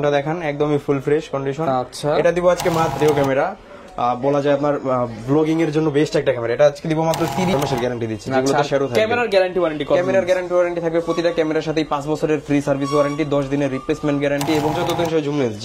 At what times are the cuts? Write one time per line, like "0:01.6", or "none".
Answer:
0:03.0
0:07.5
0:14.8